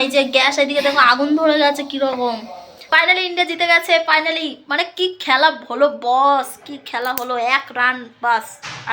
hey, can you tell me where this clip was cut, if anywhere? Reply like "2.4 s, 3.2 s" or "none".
2.8 s